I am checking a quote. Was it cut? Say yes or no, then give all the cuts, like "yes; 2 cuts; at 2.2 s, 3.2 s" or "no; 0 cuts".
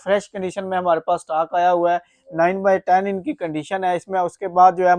no; 0 cuts